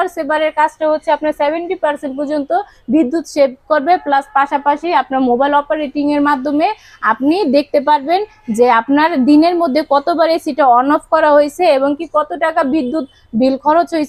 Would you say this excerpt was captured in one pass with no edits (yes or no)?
yes